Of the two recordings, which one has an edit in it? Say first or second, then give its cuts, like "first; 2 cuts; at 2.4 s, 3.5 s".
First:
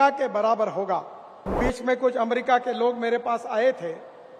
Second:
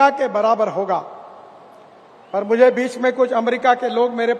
first; 1 cut; at 1.6 s